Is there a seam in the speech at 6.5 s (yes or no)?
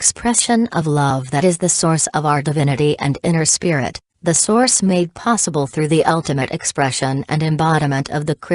no